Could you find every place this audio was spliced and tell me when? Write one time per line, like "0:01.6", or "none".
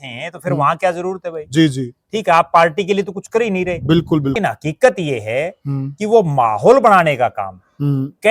0:04.3